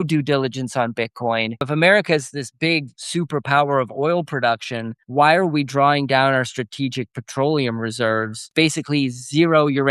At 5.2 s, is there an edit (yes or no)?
no